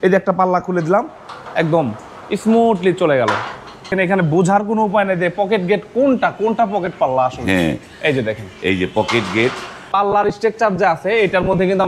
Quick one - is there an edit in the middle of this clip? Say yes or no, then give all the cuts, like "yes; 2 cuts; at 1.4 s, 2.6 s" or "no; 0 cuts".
yes; 2 cuts; at 3.9 s, 9.9 s